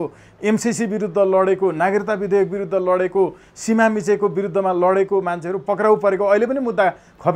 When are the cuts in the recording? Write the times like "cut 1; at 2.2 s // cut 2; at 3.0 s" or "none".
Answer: none